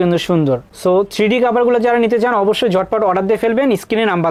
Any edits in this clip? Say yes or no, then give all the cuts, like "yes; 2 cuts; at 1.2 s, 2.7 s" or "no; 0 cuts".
no; 0 cuts